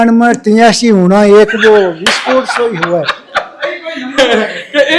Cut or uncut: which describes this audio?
uncut